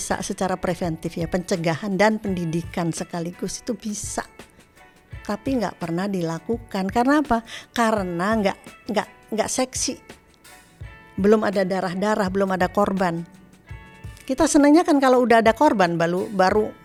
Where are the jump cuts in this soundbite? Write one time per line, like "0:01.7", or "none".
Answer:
none

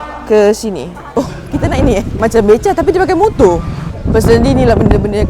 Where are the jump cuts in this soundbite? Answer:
0:01.0
0:02.1
0:03.9

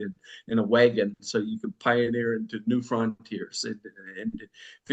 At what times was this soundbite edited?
none

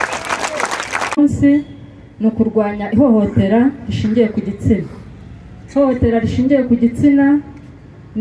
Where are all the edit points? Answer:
0:01.2

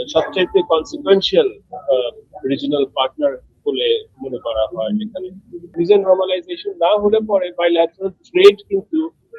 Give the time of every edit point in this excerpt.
0:05.7

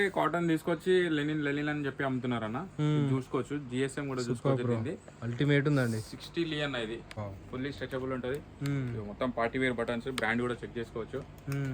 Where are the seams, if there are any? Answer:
0:07.1

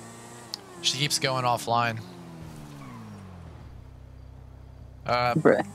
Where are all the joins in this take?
none

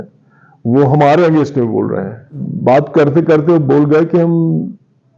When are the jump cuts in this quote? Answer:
0:02.4

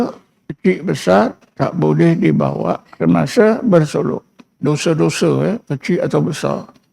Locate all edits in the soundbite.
0:01.4
0:02.8

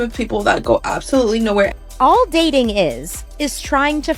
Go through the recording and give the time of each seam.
0:01.7

